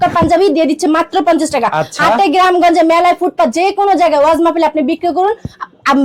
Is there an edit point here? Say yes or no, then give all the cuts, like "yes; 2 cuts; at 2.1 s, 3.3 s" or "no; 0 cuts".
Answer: no; 0 cuts